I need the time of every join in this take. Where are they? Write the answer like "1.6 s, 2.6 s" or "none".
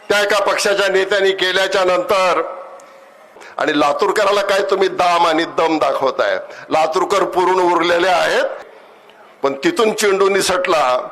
3.4 s, 8.6 s

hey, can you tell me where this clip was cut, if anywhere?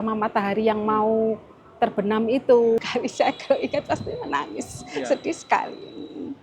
2.8 s

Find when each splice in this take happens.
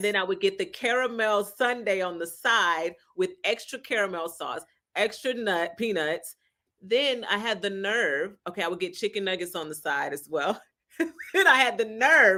none

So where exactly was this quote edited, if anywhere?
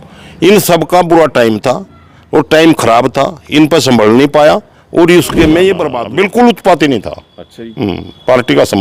6.0 s

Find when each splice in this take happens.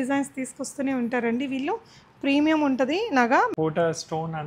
3.5 s

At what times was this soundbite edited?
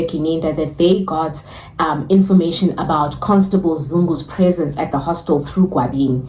none

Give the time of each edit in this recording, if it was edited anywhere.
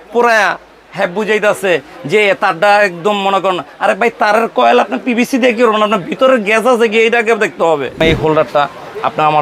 8.0 s

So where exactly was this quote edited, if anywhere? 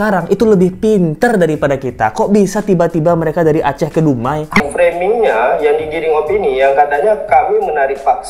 4.6 s

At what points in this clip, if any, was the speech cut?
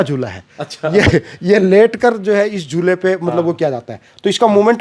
none

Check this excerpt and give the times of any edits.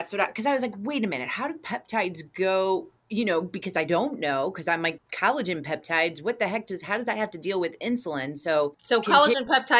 5.1 s, 8.8 s

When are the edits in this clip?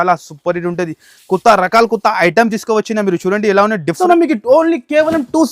4.0 s

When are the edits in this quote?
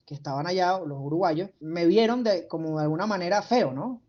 1.6 s

